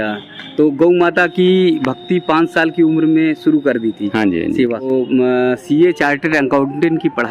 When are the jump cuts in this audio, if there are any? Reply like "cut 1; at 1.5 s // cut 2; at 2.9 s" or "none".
cut 1; at 4.9 s